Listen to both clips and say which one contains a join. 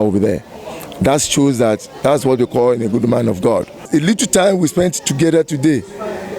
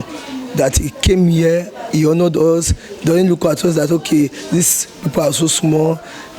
first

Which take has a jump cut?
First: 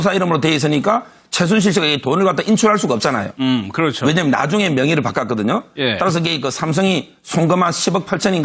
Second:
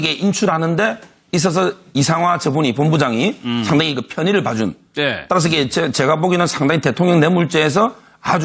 second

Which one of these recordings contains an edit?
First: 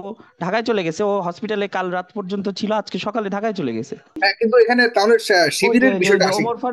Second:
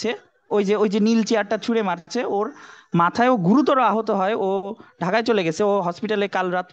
first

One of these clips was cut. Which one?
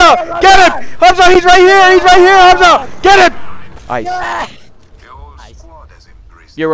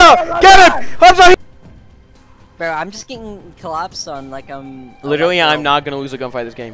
second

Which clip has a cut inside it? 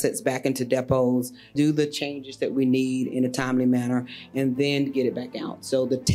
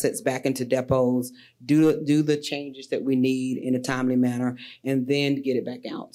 first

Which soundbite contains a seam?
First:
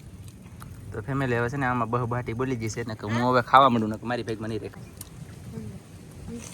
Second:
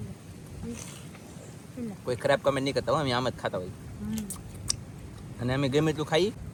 first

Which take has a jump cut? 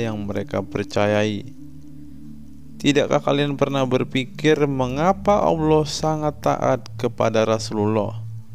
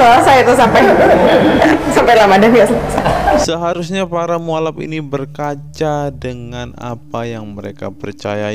second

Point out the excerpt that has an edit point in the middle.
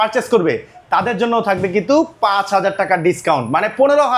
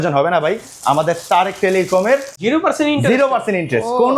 second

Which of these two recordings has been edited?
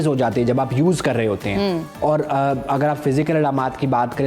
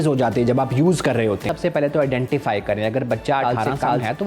second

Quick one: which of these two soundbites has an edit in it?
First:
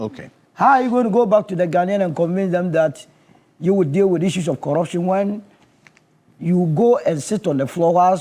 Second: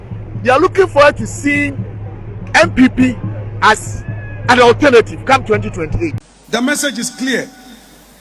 second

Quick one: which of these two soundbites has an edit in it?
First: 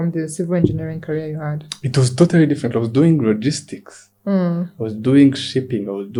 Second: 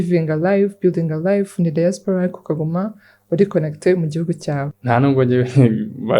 second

